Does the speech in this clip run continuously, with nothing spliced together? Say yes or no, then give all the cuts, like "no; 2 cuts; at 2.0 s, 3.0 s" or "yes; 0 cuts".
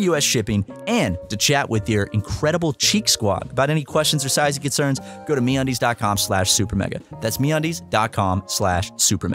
yes; 0 cuts